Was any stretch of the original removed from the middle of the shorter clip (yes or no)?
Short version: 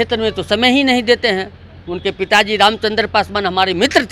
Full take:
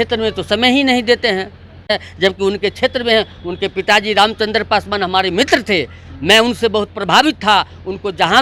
yes